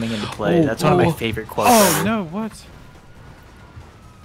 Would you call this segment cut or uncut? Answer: uncut